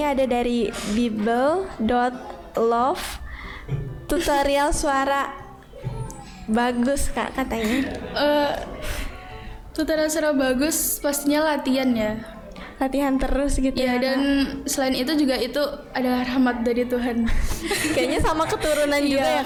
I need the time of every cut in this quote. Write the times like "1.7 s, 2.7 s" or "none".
none